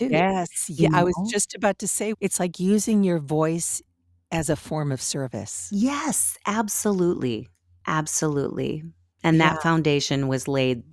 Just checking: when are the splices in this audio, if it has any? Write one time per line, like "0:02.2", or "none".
none